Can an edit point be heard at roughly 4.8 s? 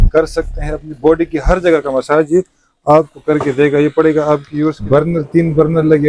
yes; 1 cut; at 4.8 s

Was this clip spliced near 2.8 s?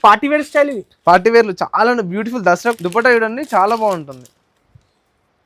yes; 1 cut; at 2.8 s

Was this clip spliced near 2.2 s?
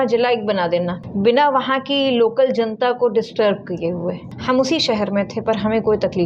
no; 2 cuts; at 1.0 s, 4.3 s

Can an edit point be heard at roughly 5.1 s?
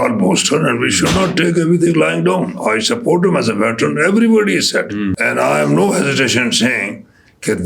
yes; 1 cut; at 5.1 s

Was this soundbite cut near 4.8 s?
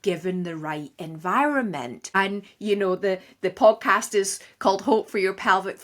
no; 1 cut; at 1.9 s

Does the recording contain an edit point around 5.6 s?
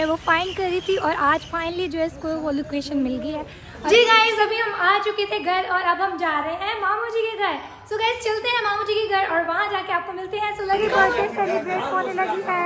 no; 2 cuts; at 3.9 s, 10.8 s

